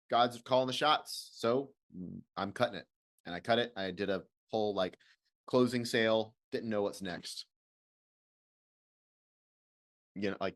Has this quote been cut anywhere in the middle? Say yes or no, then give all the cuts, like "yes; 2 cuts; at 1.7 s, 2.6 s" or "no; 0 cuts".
no; 0 cuts